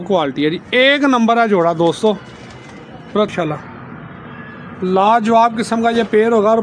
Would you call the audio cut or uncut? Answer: cut